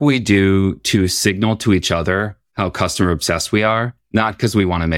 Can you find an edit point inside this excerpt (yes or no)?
yes